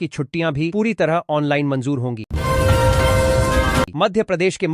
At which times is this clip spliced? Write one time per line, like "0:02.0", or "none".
0:02.3
0:03.9